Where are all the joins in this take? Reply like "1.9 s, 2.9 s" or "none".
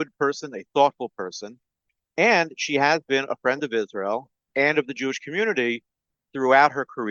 6.2 s